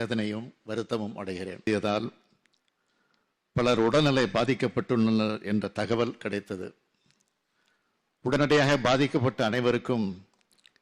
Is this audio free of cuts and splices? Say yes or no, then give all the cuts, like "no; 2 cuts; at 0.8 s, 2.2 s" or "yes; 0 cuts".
no; 1 cut; at 1.7 s